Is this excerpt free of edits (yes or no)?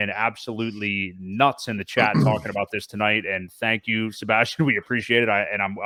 yes